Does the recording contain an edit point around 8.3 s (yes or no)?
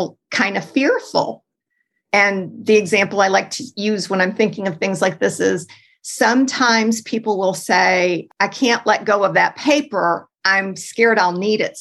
yes